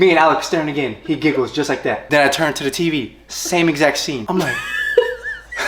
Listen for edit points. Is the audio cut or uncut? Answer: uncut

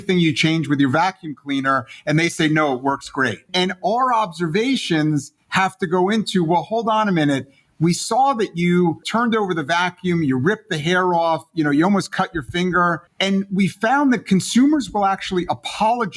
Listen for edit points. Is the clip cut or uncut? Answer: cut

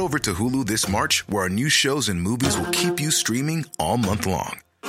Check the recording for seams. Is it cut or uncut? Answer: uncut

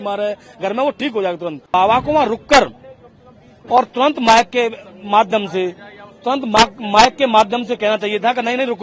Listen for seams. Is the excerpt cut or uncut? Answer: cut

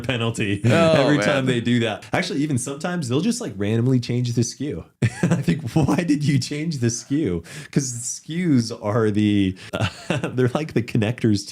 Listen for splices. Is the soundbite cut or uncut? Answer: cut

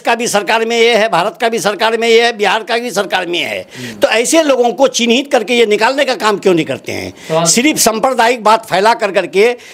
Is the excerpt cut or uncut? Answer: uncut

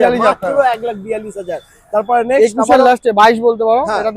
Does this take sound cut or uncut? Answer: uncut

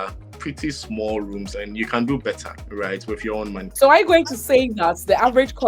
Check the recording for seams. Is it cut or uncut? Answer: cut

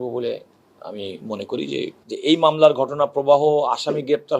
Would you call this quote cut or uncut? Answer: uncut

